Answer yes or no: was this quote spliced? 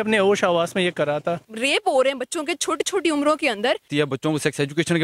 yes